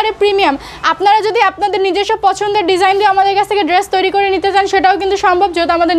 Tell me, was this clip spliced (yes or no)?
no